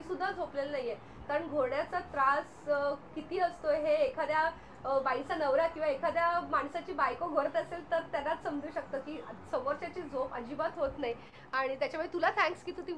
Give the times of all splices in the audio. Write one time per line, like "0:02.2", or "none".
none